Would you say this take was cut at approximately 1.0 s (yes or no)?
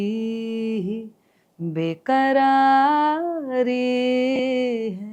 no